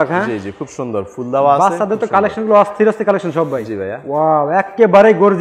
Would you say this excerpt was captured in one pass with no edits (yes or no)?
yes